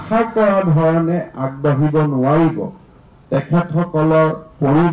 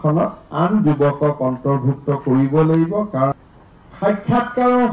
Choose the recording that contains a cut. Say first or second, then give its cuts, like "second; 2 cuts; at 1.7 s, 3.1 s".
second; 1 cut; at 3.4 s